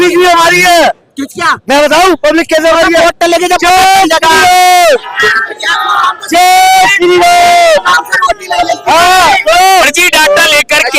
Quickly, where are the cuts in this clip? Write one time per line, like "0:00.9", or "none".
0:10.0